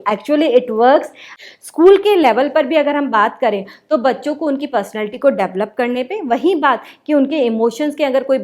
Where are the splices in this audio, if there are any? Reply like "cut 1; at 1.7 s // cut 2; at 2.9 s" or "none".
cut 1; at 1.2 s